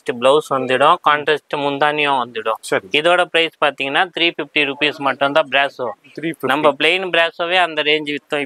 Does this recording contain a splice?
no; 0 cuts

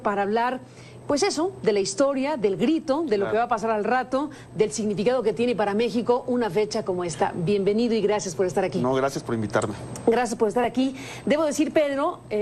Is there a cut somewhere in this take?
yes; 1 cut; at 2.6 s

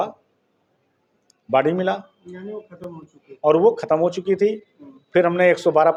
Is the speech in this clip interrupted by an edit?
no; 0 cuts

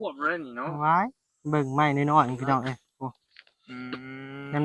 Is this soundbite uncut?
yes; 0 cuts

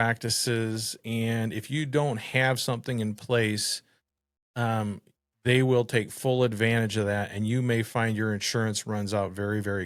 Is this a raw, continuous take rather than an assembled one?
yes; 0 cuts

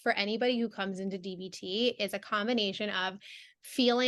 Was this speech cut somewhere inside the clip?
no; 0 cuts

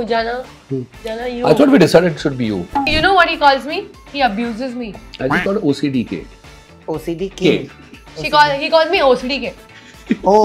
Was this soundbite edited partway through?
yes; 3 cuts; at 2.9 s, 4.0 s, 5.0 s

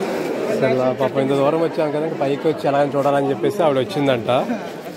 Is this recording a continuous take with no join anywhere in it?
yes; 0 cuts

